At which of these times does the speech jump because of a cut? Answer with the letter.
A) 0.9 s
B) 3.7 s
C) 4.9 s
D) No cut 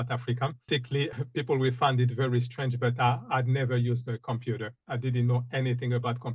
A